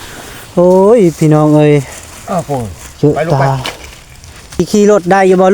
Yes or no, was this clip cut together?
yes